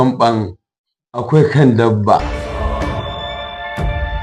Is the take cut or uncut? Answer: cut